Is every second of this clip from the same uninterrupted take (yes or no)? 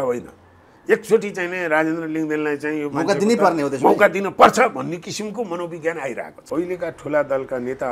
no